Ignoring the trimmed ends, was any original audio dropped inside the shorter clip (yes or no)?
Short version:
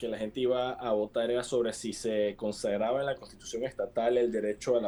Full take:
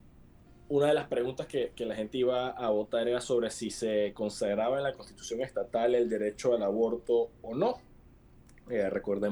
no